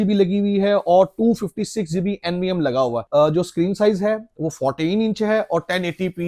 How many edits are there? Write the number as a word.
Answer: zero